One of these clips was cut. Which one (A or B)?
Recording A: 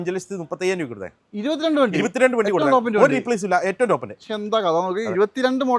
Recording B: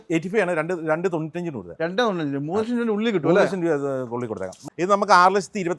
B